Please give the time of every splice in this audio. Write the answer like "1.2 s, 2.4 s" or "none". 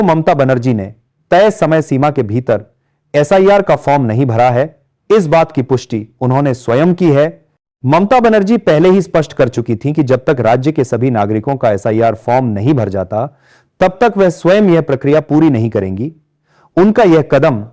none